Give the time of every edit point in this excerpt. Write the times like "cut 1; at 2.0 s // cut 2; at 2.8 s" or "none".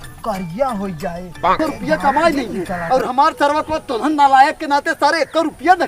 cut 1; at 1.6 s